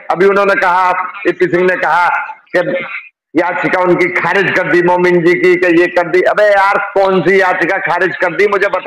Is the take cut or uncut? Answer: uncut